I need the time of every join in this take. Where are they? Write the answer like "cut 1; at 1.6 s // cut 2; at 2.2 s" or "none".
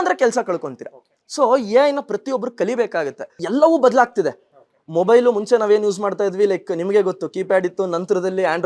cut 1; at 3.4 s